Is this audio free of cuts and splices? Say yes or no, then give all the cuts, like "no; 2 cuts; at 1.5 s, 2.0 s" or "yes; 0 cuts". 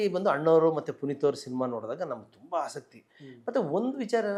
yes; 0 cuts